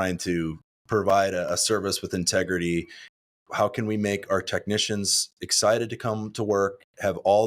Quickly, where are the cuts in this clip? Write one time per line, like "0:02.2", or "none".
0:03.0